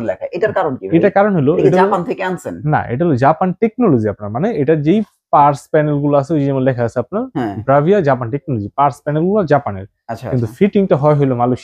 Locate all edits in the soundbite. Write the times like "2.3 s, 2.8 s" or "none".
none